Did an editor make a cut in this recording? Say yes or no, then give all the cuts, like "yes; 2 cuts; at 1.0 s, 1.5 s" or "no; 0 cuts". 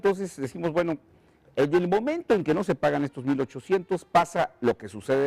no; 0 cuts